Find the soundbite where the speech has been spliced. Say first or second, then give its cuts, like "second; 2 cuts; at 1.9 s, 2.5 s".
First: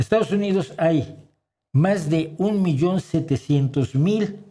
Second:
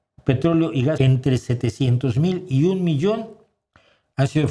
second; 1 cut; at 1.0 s